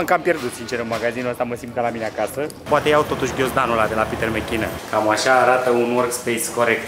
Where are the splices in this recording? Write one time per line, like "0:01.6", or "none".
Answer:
0:02.7
0:04.8